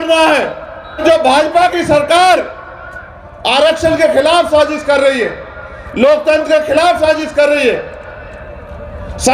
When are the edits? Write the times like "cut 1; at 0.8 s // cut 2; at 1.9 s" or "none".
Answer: cut 1; at 1.0 s